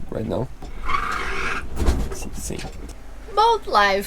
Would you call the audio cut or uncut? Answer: cut